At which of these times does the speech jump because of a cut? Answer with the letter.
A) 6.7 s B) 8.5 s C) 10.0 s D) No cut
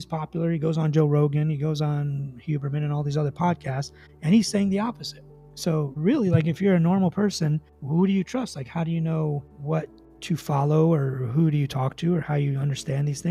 D